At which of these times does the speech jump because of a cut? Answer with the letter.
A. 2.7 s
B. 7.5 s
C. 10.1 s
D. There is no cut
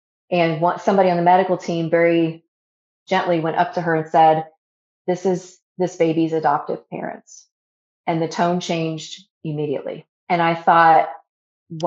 C